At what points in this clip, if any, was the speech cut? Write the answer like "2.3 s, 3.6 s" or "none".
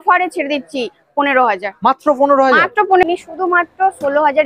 3.0 s